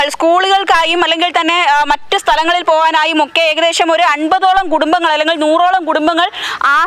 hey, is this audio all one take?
yes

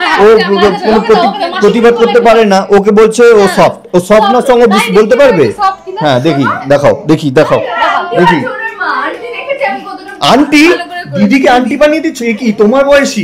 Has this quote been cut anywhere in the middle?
no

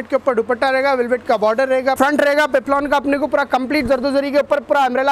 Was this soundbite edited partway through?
yes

